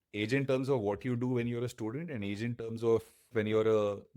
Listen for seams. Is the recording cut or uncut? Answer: cut